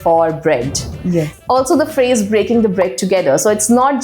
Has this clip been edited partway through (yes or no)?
yes